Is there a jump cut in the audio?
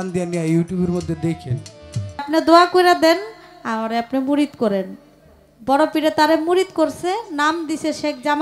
yes; 1 cut; at 2.3 s

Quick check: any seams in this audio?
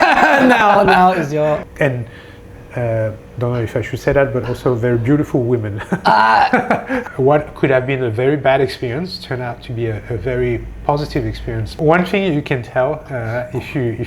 yes; 3 cuts; at 1.6 s, 7.0 s, 11.8 s

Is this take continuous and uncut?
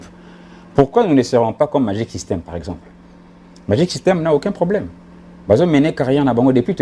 yes; 0 cuts

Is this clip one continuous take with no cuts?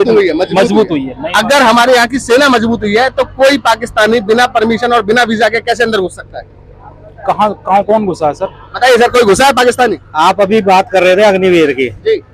yes; 0 cuts

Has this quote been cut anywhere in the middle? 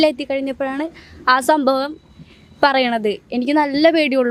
no; 0 cuts

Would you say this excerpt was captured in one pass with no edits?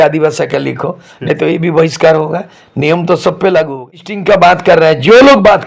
no; 1 cut; at 4.1 s

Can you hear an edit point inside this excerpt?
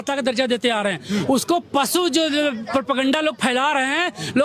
no; 0 cuts

